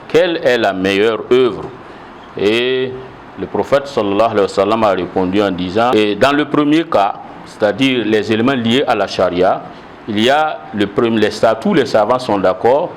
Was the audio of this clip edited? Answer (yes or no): yes